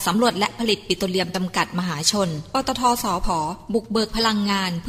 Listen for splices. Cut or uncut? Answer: uncut